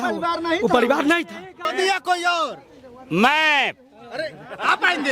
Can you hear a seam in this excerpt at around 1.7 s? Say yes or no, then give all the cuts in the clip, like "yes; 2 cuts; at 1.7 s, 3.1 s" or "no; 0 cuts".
yes; 1 cut; at 1.7 s